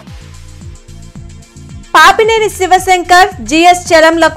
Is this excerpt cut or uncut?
cut